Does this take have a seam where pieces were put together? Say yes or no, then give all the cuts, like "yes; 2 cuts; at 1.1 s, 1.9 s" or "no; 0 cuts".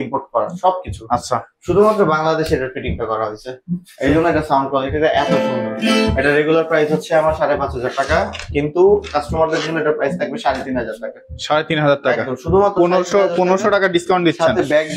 no; 0 cuts